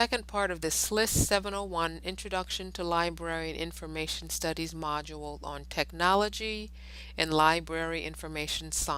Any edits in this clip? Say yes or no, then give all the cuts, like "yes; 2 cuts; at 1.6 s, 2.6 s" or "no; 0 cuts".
no; 0 cuts